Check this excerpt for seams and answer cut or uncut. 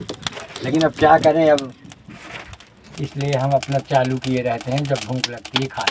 cut